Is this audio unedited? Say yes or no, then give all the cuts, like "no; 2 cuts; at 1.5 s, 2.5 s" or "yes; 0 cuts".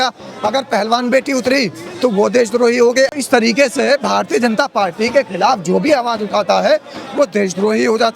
no; 1 cut; at 3.1 s